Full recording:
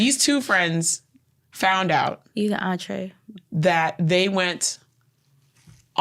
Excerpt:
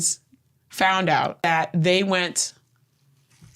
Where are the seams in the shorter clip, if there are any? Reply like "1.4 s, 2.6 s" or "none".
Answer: 1.4 s